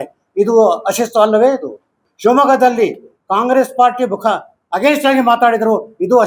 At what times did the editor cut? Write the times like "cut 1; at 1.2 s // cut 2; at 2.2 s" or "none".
cut 1; at 2.0 s